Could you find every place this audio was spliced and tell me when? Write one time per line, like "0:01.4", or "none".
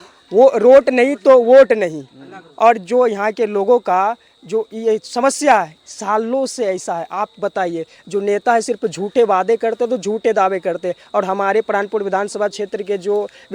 none